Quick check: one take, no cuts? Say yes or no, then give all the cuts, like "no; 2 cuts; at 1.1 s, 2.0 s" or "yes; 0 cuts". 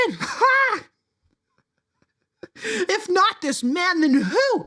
yes; 0 cuts